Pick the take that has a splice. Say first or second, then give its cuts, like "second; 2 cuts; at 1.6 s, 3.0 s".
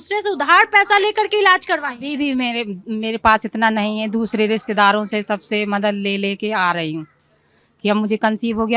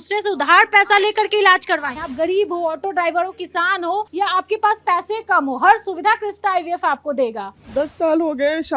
second; 3 cuts; at 2.0 s, 4.1 s, 7.5 s